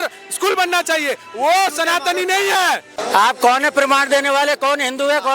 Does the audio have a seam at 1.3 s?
no; 1 cut; at 2.9 s

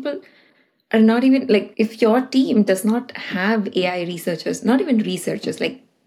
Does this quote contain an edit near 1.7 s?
yes; 1 cut; at 1.7 s

